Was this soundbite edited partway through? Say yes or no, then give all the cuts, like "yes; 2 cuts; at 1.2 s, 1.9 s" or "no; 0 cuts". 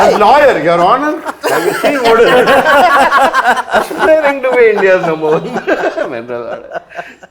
no; 0 cuts